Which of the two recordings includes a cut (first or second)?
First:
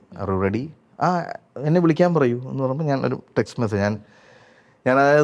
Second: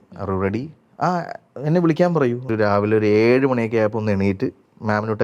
second